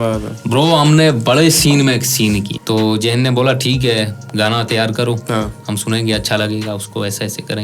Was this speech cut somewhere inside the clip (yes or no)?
yes